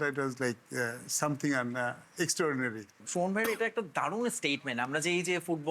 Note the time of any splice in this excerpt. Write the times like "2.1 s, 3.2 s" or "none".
none